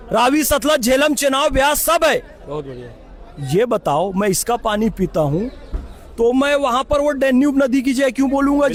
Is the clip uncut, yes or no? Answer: yes